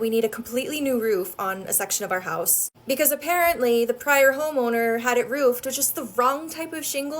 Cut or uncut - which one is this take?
uncut